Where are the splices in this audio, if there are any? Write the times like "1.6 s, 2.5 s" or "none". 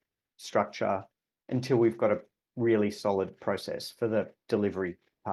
none